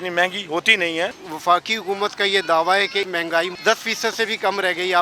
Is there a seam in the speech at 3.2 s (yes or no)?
yes